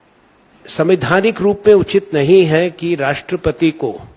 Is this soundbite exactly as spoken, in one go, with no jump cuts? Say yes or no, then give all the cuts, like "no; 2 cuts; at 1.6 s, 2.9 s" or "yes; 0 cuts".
yes; 0 cuts